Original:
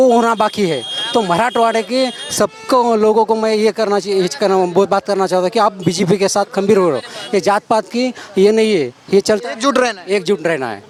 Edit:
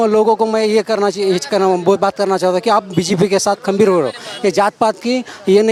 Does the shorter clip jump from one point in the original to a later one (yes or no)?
no